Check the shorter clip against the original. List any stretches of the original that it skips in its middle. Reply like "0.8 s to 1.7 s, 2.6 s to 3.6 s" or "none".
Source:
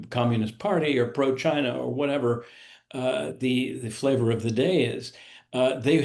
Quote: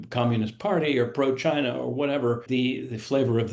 2.4 s to 3.4 s